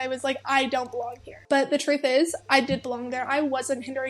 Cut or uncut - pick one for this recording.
cut